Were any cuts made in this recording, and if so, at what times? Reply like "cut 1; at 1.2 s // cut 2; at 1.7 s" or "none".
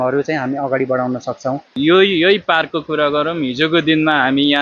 cut 1; at 1.7 s